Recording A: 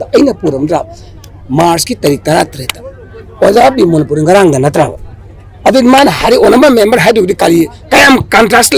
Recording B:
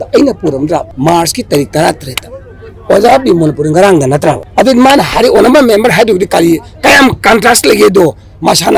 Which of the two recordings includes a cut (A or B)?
B